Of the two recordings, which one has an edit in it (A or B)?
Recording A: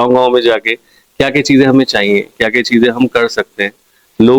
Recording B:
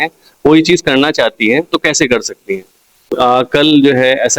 B